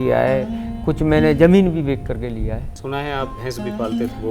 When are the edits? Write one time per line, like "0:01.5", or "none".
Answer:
0:02.7